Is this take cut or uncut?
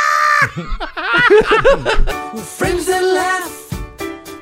cut